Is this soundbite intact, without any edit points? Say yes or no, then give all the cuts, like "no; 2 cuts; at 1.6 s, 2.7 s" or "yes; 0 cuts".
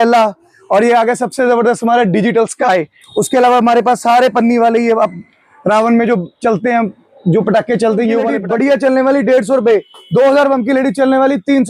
yes; 0 cuts